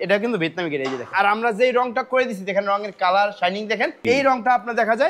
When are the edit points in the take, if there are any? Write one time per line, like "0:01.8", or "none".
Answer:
0:01.1
0:04.0